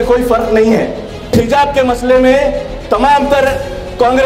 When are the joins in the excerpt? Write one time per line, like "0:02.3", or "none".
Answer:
0:01.3